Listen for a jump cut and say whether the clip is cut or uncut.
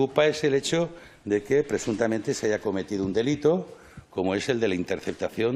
uncut